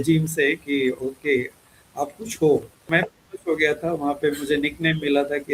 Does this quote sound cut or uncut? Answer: cut